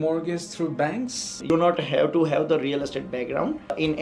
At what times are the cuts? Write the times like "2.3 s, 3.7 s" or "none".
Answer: 1.4 s